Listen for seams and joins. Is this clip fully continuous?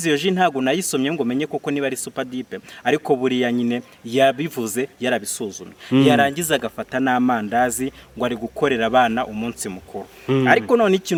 yes; 0 cuts

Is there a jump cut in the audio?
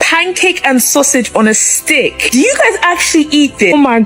no; 0 cuts

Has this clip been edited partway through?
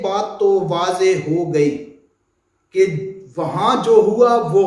no; 0 cuts

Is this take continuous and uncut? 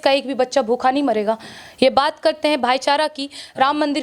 yes; 0 cuts

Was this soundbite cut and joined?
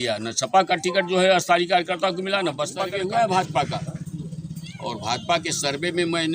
yes; 1 cut; at 2.9 s

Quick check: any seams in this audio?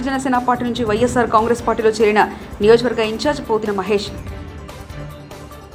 no; 0 cuts

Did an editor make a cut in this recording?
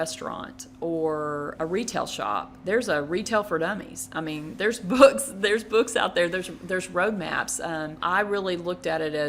yes; 3 cuts; at 1.5 s, 2.5 s, 7.9 s

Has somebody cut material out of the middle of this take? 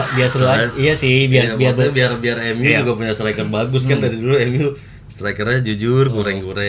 no; 0 cuts

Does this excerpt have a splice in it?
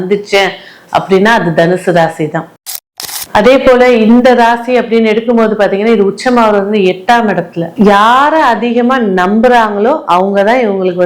yes; 1 cut; at 2.7 s

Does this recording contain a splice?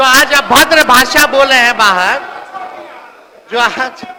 no; 0 cuts

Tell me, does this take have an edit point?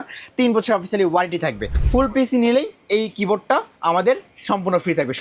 yes; 1 cut; at 1.7 s

